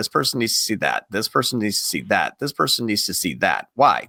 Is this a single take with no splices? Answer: yes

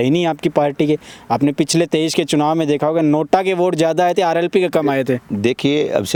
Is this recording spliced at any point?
no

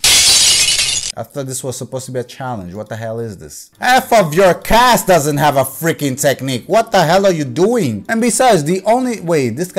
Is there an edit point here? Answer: no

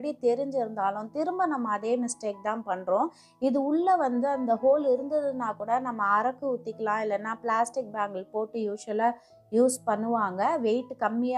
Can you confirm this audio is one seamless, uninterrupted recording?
yes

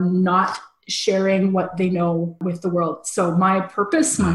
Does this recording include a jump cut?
yes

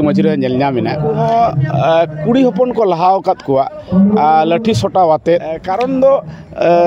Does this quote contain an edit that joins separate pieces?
yes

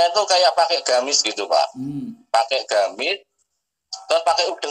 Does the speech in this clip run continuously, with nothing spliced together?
yes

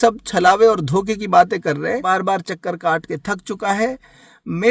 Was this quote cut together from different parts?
yes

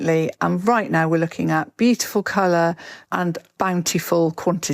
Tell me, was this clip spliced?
yes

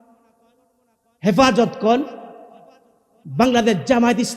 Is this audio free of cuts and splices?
yes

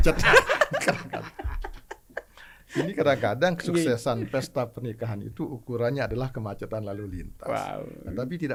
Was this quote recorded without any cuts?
yes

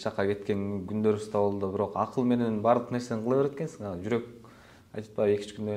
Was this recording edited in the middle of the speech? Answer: no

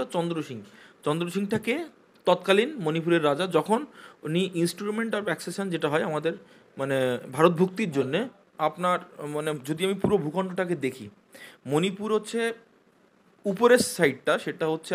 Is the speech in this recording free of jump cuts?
no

